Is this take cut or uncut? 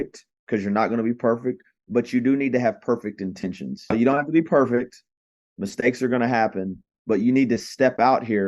cut